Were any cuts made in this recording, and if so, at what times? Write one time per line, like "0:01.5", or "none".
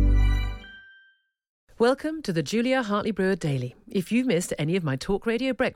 0:01.6